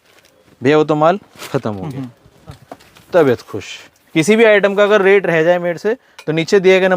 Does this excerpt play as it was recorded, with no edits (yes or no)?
no